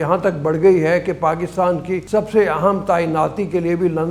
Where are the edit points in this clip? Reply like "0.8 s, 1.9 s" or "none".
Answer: 2.0 s